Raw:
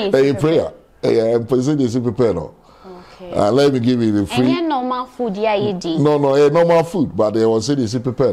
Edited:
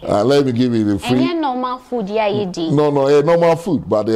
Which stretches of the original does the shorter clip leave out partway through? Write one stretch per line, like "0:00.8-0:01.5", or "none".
none